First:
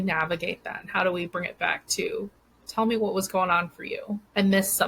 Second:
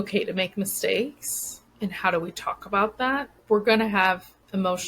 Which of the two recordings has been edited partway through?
second; 1 cut; at 3.4 s

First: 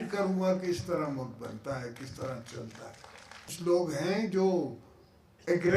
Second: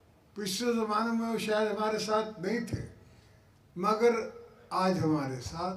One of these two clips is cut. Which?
first; 1 cut; at 3.5 s

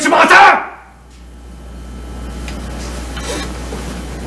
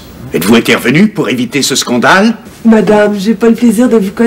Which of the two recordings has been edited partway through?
second; 1 cut; at 2.5 s

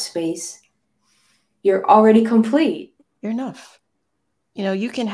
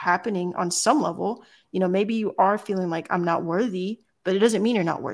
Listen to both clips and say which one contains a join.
first; 1 cut; at 2.8 s

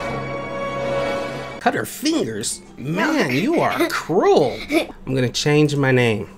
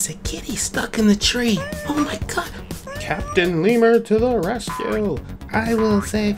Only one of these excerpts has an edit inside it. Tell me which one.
first; 2 cuts; at 1.3 s, 4.9 s

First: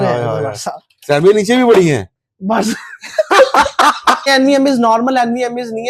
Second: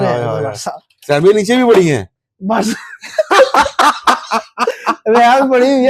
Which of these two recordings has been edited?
first; 1 cut; at 4.3 s

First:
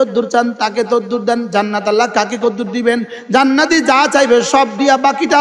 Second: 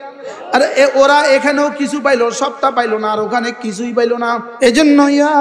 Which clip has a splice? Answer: second; 1 cut; at 4.5 s

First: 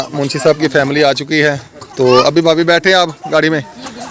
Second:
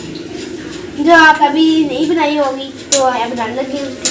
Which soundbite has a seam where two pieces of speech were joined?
second; 2 cuts; at 1.5 s, 3.2 s

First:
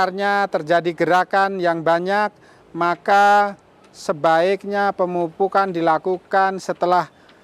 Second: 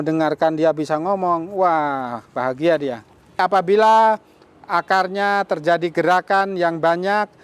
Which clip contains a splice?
second; 1 cut; at 3.4 s

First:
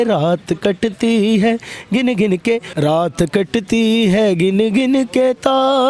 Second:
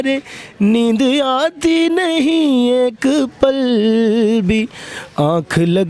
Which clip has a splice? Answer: first; 1 cut; at 2.7 s

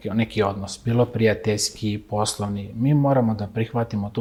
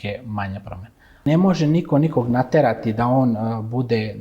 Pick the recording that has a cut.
second; 1 cut; at 1.3 s

